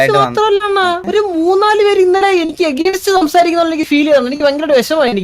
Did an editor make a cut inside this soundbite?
yes; 1 cut; at 1.0 s

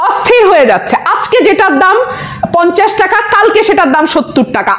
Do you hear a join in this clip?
no; 0 cuts

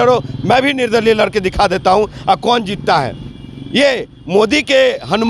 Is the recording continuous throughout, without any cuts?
yes; 0 cuts

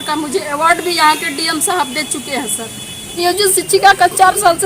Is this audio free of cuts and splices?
no; 1 cut; at 3.2 s

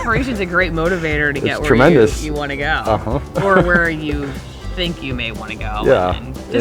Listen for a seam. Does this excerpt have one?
no; 0 cuts

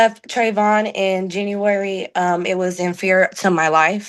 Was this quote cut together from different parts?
no; 0 cuts

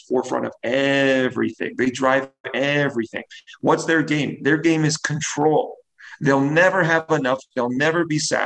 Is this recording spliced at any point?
no; 0 cuts

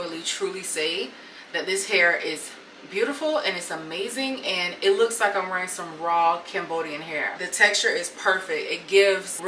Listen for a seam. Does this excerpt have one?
no; 0 cuts

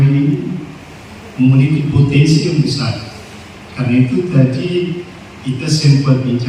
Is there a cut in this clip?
no; 0 cuts

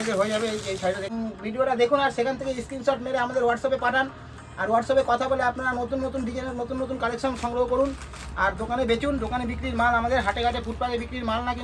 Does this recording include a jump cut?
yes; 1 cut; at 1.1 s

